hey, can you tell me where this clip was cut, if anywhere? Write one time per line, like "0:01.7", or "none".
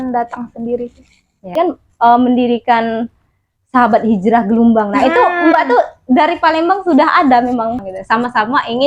0:01.6
0:07.9